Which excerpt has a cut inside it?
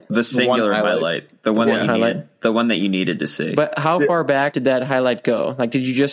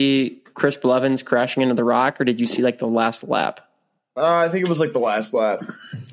first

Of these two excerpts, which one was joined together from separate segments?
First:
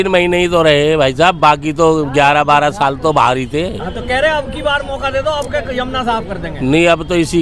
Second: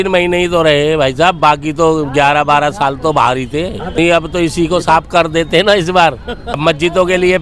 second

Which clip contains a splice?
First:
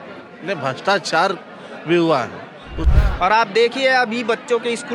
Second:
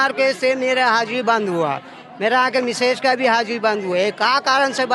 first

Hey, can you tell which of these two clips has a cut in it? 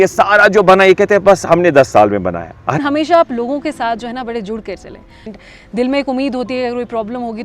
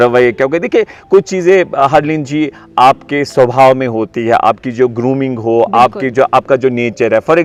first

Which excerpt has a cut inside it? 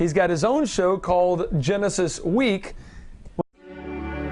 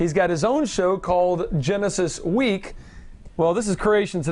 second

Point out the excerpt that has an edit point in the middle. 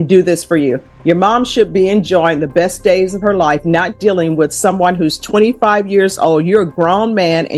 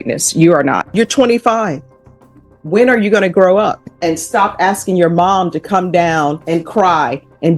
second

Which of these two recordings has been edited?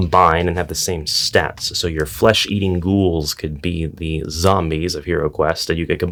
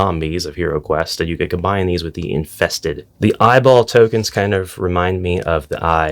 second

